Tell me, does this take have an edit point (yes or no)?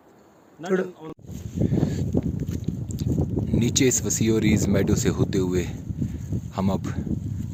no